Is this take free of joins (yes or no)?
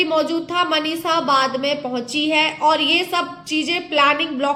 yes